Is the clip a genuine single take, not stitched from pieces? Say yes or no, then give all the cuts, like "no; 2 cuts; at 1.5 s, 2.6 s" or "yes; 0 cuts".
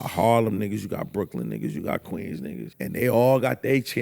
no; 1 cut; at 2.7 s